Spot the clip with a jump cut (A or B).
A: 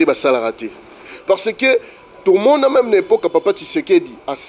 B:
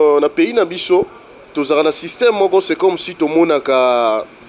A